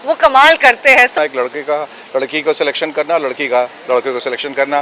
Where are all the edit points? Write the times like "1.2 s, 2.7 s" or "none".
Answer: 1.1 s